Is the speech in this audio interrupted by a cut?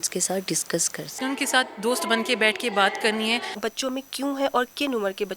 yes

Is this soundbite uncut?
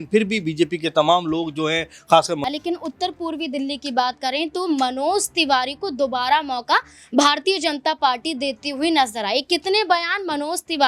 no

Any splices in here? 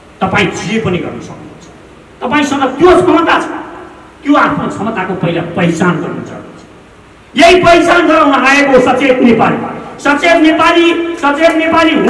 no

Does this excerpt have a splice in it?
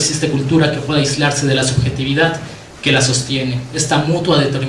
yes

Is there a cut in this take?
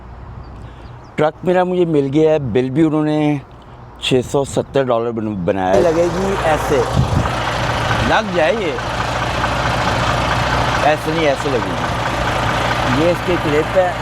yes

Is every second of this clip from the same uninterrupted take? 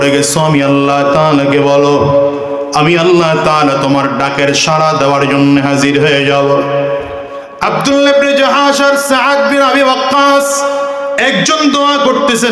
yes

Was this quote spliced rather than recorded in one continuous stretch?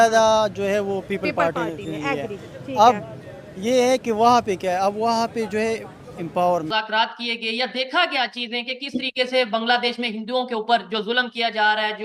yes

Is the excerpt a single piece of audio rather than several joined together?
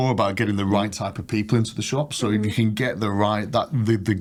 yes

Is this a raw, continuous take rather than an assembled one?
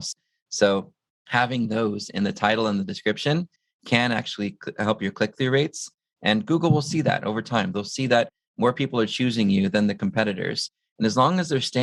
yes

